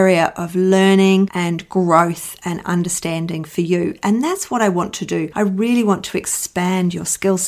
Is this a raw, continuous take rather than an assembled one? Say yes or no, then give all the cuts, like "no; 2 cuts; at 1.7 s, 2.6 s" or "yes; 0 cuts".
yes; 0 cuts